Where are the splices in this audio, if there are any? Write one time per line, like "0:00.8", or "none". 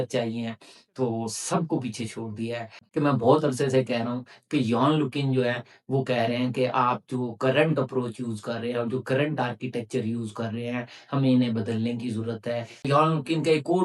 0:02.8
0:12.9

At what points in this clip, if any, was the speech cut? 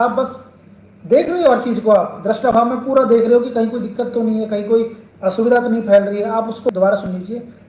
0:06.7

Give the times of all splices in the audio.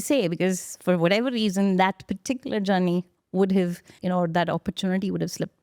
0:03.9

